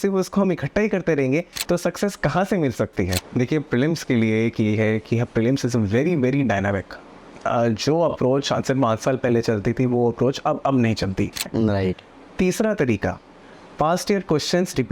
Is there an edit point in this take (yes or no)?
yes